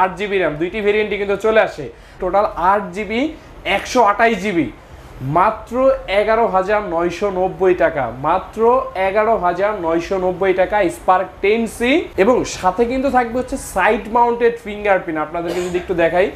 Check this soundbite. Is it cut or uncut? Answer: cut